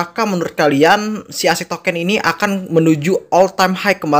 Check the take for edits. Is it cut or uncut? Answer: uncut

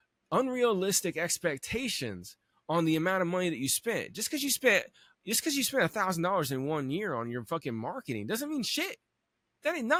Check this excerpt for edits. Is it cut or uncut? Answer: uncut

